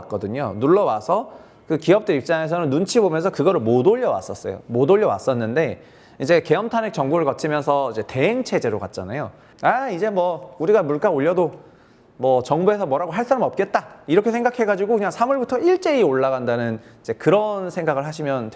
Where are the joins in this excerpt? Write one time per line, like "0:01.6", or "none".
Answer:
0:09.4